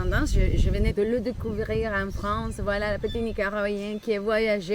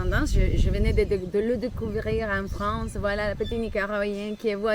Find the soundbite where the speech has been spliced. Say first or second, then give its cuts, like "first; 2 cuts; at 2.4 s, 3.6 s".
first; 1 cut; at 0.9 s